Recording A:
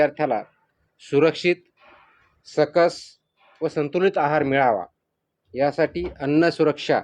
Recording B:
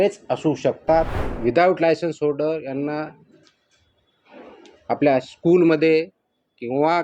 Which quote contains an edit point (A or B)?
B